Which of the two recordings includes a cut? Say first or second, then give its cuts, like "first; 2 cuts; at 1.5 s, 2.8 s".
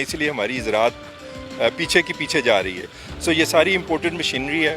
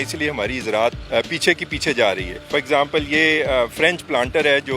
second; 2 cuts; at 1.0 s, 2.4 s